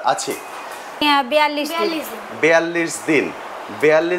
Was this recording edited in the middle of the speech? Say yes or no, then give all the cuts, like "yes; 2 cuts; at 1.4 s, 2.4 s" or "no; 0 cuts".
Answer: yes; 1 cut; at 1.0 s